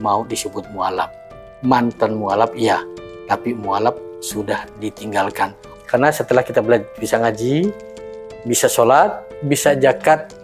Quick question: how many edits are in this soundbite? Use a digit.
1